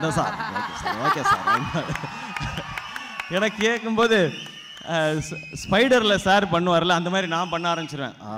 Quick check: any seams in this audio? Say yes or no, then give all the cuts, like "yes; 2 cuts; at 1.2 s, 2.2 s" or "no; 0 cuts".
no; 0 cuts